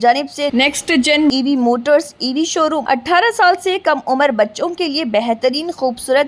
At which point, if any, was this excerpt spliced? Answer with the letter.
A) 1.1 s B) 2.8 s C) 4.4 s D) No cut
B